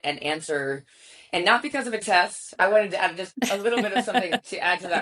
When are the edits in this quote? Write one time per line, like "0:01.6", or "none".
0:02.4

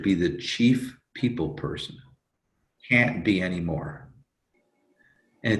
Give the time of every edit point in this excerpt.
0:02.7

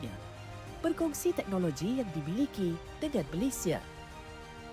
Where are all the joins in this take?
none

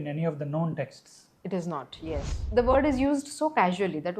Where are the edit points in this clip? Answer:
0:02.4

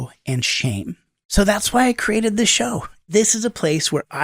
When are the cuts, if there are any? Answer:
0:01.2
0:03.1

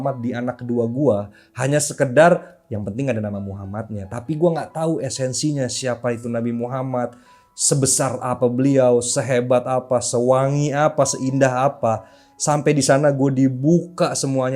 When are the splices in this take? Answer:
none

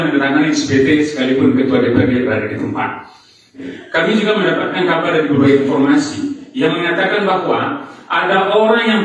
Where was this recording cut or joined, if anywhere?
0:03.6

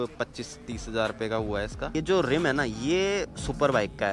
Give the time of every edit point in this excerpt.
0:02.0

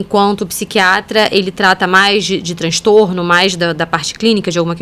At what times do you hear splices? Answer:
none

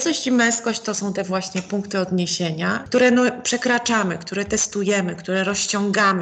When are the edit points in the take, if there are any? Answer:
0:02.8

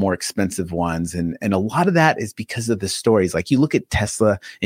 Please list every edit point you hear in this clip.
none

